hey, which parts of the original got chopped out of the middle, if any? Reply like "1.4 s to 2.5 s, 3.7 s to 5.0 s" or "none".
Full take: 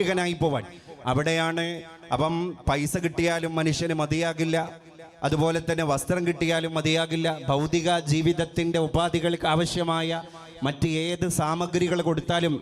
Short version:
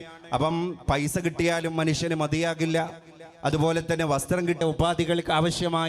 6.4 s to 8.7 s